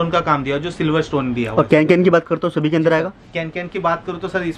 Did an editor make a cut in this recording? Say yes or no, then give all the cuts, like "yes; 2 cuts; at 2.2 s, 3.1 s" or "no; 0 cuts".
no; 0 cuts